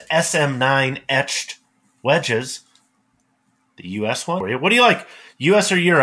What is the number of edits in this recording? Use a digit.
1